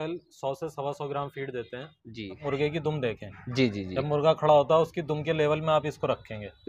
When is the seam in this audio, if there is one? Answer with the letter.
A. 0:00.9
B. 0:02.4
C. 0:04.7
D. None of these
B